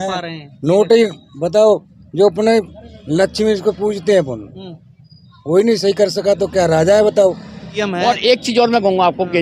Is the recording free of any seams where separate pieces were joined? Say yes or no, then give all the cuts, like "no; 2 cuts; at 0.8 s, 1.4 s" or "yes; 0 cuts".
no; 1 cut; at 7.7 s